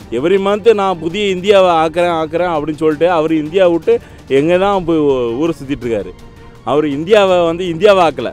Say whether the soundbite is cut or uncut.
uncut